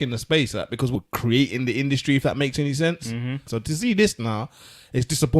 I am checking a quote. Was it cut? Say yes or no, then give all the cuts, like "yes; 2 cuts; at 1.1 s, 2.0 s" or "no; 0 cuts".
yes; 2 cuts; at 0.9 s, 3.5 s